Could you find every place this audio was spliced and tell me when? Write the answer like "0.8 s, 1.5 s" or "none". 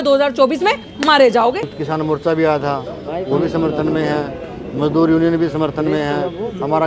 1.8 s